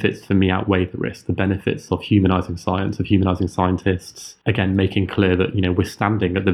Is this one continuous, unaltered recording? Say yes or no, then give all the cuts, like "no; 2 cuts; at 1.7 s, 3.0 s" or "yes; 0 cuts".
yes; 0 cuts